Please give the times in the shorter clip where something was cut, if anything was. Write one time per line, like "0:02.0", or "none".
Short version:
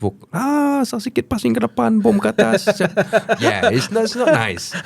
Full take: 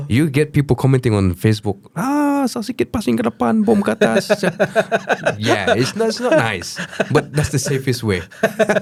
0:03.4